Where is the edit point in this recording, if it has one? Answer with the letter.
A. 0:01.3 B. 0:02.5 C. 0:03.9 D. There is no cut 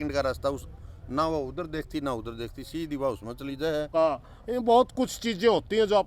C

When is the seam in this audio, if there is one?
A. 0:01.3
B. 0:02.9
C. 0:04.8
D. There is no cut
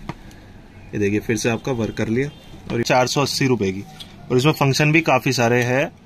B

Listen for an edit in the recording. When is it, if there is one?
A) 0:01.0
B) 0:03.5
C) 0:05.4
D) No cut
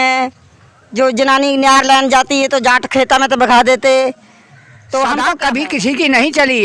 C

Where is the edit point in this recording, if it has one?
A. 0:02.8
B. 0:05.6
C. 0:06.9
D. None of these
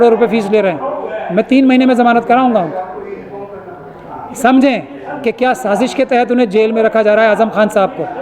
D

